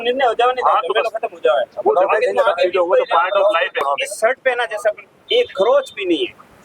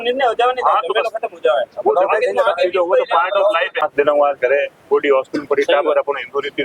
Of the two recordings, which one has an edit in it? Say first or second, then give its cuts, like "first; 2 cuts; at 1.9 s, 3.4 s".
first; 1 cut; at 3.8 s